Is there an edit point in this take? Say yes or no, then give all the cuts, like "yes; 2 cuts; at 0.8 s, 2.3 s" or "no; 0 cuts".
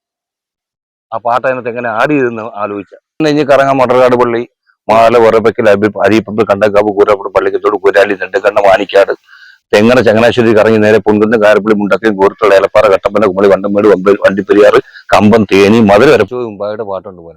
yes; 2 cuts; at 3.2 s, 16.3 s